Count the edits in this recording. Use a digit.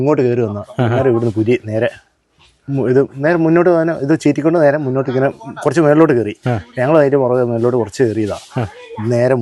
0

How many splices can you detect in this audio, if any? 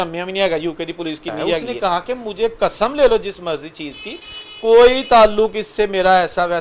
1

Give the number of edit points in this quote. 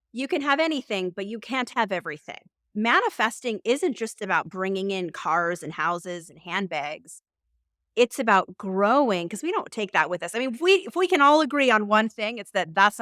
1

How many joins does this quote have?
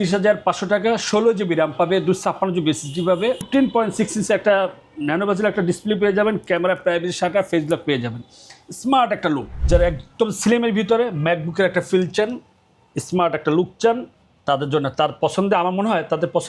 2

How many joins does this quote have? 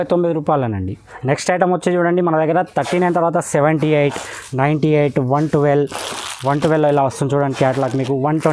0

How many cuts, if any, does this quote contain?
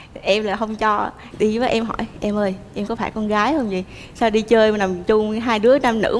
1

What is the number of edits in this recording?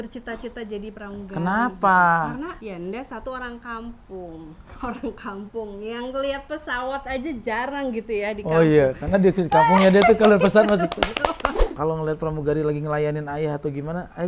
2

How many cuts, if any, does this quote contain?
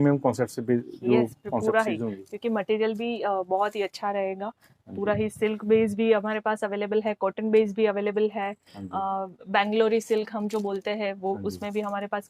0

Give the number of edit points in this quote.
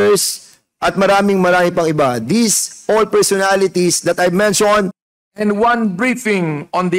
1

